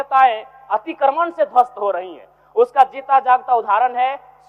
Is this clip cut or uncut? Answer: uncut